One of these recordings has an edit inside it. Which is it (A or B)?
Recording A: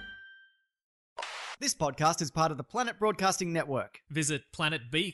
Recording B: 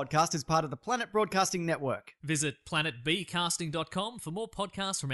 A